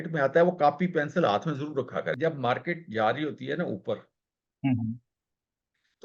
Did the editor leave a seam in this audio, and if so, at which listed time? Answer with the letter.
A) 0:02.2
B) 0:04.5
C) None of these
A